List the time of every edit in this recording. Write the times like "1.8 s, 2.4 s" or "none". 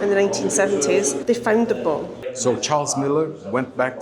1.2 s, 2.2 s